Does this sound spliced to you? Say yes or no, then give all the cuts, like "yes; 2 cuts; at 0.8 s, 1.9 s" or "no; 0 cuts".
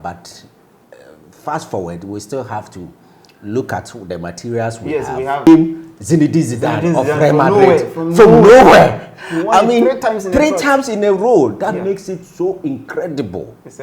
yes; 1 cut; at 5.5 s